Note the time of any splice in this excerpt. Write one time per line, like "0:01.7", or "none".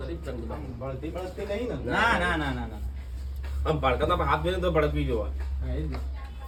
none